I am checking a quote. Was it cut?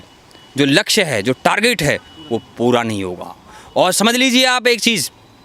no; 0 cuts

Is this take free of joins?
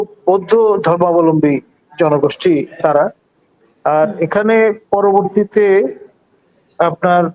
yes; 0 cuts

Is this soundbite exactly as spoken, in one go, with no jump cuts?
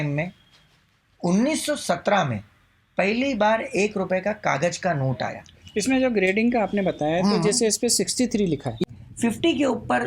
no; 2 cuts; at 5.5 s, 8.8 s

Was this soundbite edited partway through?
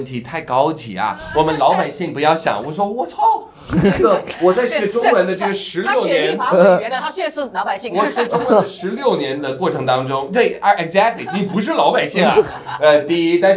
no; 0 cuts

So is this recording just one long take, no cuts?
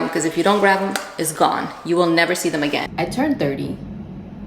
no; 1 cut; at 2.9 s

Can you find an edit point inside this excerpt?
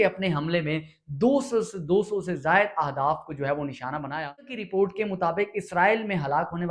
yes; 1 cut; at 4.5 s

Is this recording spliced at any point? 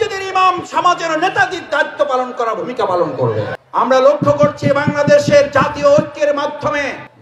yes; 1 cut; at 3.5 s

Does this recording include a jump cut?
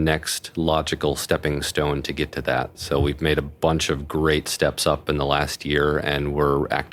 no; 0 cuts

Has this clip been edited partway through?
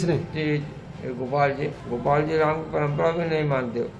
yes; 1 cut; at 1.8 s

